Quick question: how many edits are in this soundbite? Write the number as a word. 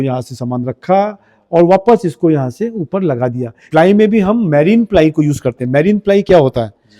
one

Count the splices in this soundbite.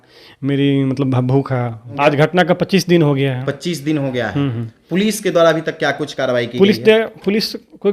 one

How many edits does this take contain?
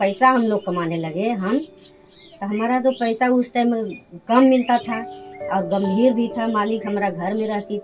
zero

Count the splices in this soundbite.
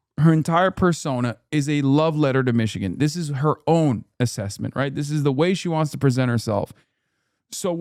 zero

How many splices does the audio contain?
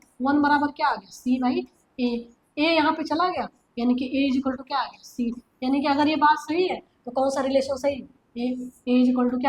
zero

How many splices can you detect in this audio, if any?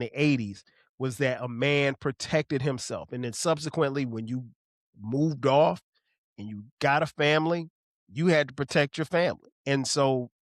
one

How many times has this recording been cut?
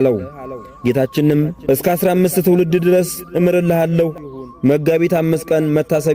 one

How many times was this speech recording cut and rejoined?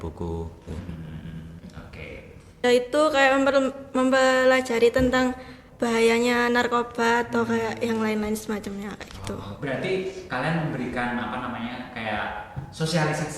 one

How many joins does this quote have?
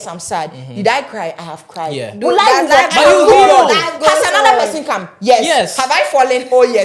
zero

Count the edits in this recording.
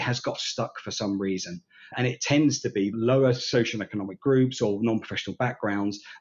one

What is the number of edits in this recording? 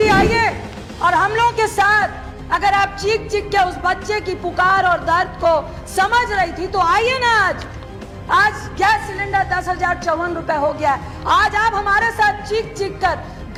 zero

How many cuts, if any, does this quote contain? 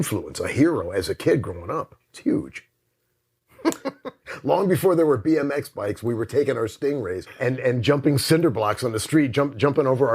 three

